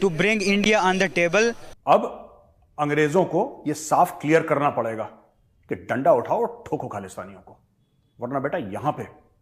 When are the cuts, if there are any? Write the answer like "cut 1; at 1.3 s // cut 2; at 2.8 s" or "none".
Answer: cut 1; at 1.7 s